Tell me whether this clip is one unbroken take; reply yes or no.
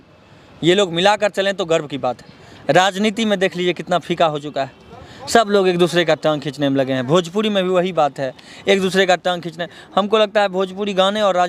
yes